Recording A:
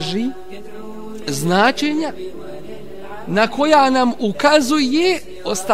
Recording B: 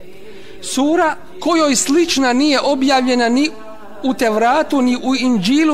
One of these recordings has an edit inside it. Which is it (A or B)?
B